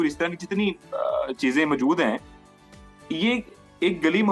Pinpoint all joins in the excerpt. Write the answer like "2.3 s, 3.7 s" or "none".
none